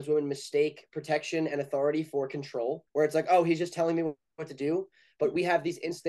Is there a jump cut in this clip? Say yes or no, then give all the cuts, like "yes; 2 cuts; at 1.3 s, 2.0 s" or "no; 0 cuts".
yes; 1 cut; at 2.8 s